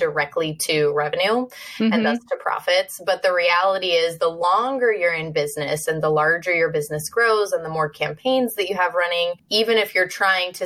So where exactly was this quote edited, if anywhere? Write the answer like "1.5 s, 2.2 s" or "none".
9.4 s